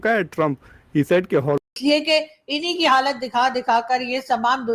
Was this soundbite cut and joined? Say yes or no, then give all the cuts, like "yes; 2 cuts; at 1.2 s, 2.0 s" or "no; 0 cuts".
yes; 1 cut; at 1.6 s